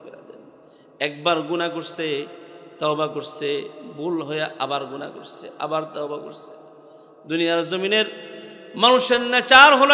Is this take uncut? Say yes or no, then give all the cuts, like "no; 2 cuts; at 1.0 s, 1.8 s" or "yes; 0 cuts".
yes; 0 cuts